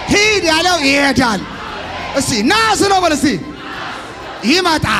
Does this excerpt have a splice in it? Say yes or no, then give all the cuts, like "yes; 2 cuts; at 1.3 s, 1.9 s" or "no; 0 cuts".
no; 0 cuts